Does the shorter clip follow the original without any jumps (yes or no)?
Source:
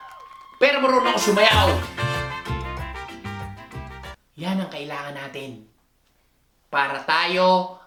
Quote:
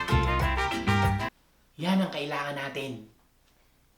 no